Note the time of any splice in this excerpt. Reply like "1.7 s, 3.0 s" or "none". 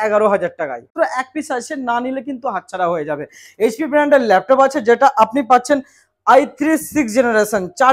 0.9 s